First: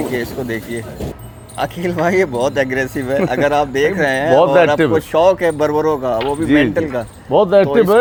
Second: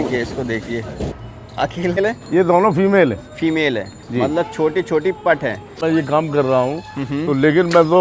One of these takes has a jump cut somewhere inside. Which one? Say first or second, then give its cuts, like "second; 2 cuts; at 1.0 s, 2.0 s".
second; 2 cuts; at 2.0 s, 5.8 s